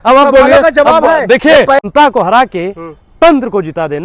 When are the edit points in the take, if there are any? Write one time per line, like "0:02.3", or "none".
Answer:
0:01.9